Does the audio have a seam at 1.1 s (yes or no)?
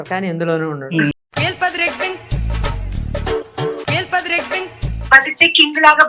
yes